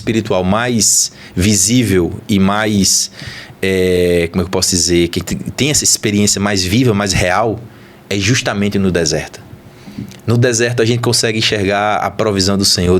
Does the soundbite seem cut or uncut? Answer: uncut